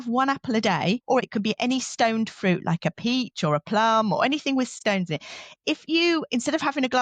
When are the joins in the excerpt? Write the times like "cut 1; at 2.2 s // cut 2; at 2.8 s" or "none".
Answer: cut 1; at 1.0 s // cut 2; at 4.8 s